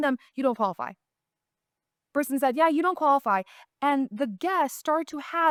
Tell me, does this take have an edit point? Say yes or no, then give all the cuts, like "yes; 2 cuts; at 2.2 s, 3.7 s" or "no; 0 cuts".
no; 0 cuts